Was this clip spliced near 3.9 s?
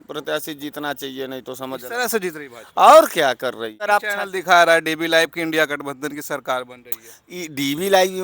yes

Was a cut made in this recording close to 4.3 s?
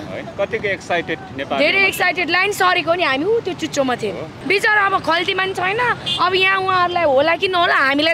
yes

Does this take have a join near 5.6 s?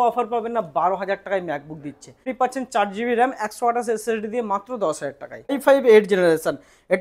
yes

